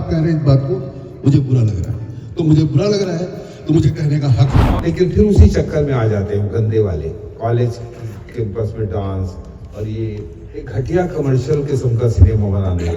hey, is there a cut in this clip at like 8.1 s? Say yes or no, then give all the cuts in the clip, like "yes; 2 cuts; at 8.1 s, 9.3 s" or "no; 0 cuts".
no; 1 cut; at 4.7 s